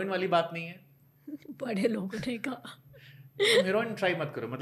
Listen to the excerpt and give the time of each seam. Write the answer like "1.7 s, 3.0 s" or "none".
none

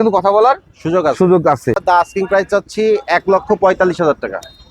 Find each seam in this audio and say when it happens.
1.8 s

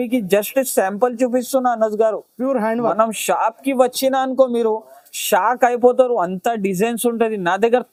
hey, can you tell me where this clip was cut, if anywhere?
none

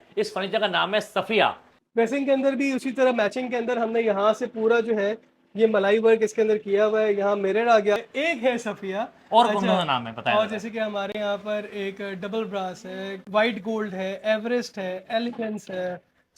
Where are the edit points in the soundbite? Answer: 1.7 s, 8.1 s

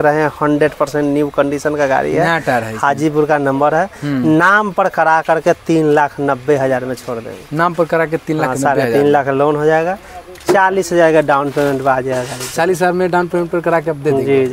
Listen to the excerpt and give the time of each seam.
none

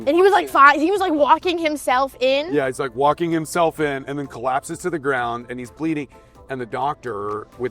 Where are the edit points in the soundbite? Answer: none

